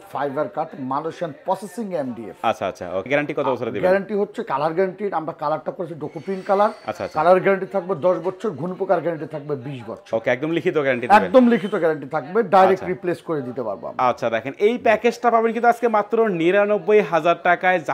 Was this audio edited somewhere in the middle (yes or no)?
no